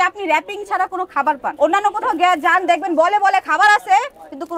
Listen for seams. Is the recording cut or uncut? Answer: uncut